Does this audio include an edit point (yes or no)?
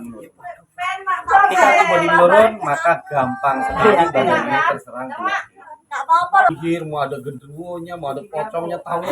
yes